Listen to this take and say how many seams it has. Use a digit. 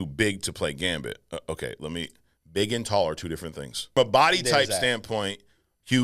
1